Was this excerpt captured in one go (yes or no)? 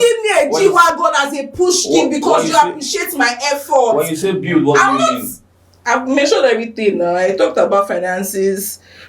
yes